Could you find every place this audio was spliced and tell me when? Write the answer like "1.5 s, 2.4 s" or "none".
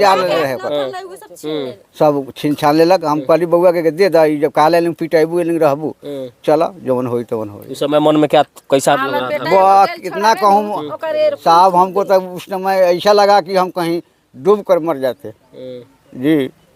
none